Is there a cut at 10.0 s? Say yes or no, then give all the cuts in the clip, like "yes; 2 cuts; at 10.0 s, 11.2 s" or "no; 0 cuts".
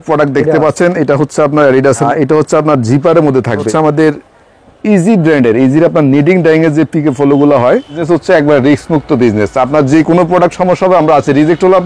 no; 3 cuts; at 2.0 s, 3.7 s, 8.0 s